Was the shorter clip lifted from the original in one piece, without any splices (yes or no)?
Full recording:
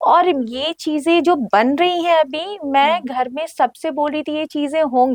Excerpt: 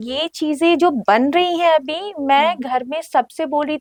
yes